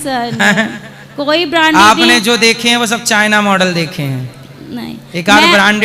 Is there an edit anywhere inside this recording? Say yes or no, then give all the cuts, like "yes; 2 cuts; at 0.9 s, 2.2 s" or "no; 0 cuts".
no; 0 cuts